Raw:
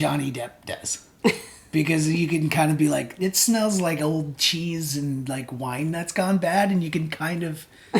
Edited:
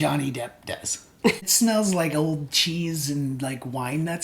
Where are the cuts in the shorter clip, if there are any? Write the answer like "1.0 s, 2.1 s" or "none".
1.5 s

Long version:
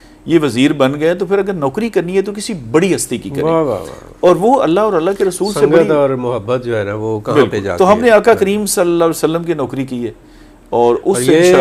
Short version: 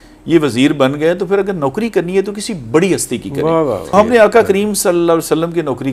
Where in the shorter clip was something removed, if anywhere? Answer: 3.9 s

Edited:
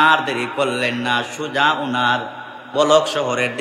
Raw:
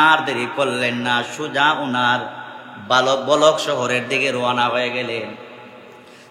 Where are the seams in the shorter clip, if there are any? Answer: 2.7 s

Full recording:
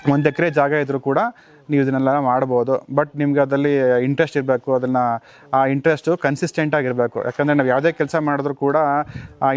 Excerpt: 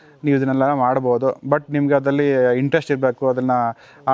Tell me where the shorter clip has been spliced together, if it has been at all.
none

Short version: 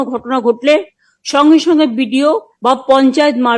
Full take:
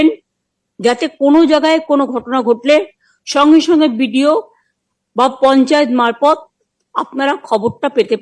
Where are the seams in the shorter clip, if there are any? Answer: 2.5 s

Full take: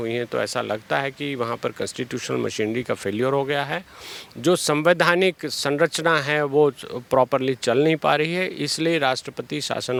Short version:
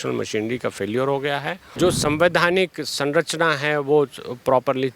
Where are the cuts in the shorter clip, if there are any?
1.6 s

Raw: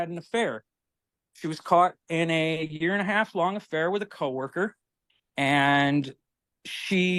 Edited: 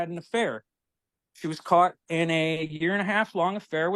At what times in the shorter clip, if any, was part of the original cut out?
none

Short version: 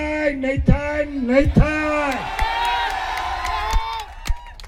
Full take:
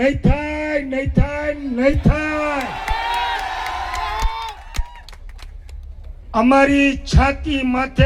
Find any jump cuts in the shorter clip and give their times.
none

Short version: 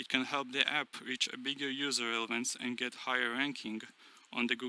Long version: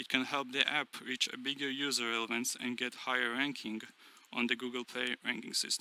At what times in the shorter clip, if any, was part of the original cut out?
none

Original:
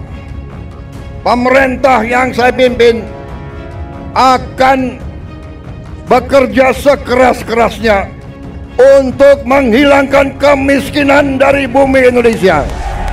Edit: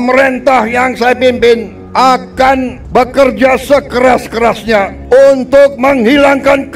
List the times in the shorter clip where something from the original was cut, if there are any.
1.8 s, 2.8 s, 5.0 s

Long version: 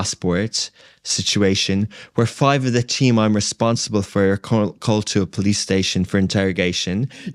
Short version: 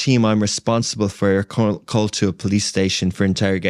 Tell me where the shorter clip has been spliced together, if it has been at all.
none

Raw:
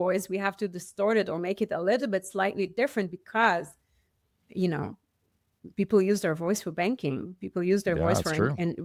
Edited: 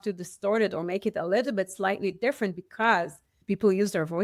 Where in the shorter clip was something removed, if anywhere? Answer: 3.3 s

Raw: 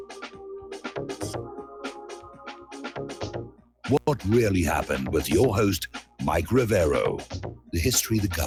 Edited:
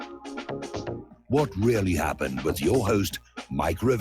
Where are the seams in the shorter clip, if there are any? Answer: 1.3 s

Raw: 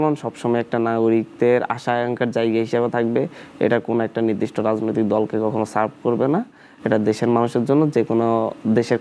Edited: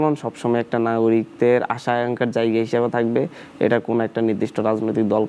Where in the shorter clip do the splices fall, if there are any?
none

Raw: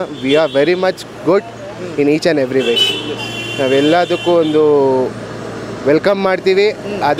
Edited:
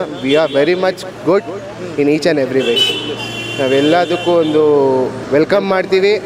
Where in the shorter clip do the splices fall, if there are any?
5.2 s

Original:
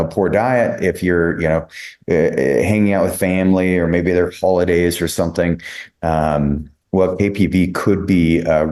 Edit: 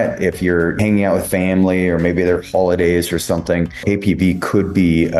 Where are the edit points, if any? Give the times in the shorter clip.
0.8 s, 3.8 s

